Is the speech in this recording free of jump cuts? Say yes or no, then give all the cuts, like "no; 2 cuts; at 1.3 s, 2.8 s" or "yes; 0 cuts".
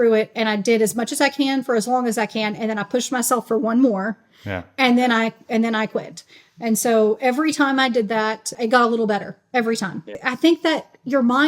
no; 2 cuts; at 8.5 s, 10.2 s